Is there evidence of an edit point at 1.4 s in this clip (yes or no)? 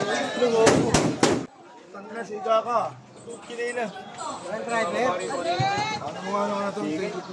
yes